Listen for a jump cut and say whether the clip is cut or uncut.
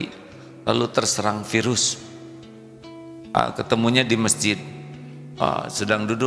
uncut